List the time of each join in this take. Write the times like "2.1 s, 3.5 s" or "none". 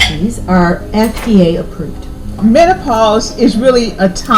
2.4 s